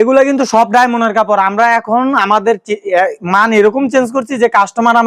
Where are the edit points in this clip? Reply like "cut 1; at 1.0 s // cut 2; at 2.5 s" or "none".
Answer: none